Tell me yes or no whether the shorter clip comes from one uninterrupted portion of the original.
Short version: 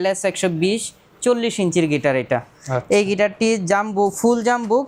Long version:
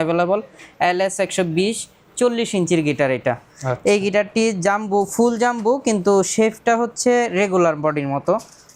yes